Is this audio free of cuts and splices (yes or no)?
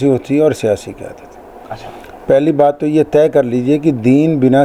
yes